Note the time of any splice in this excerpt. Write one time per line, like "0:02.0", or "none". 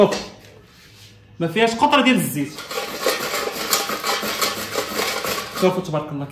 none